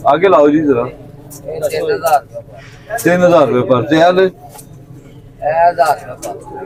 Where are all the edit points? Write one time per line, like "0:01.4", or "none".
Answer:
none